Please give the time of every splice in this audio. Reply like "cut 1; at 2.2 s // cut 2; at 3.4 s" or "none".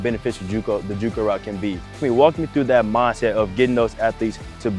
cut 1; at 2.0 s